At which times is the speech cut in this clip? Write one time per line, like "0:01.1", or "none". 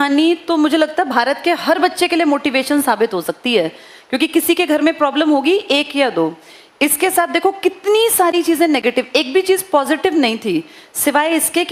none